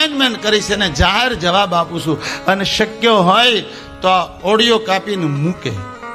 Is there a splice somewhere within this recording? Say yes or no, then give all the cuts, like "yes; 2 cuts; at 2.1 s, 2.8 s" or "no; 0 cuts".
no; 0 cuts